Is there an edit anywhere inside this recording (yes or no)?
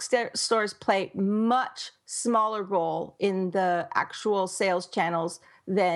no